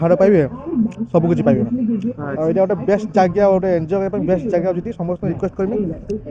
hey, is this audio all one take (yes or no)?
yes